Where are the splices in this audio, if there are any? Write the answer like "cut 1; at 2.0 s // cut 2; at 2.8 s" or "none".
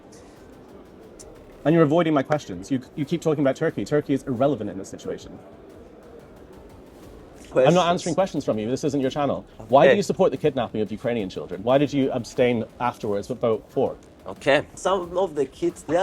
cut 1; at 7.4 s // cut 2; at 14.8 s